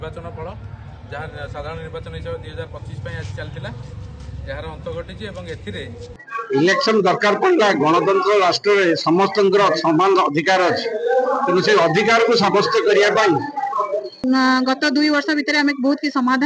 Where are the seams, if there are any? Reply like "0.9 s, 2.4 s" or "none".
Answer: 6.3 s, 14.2 s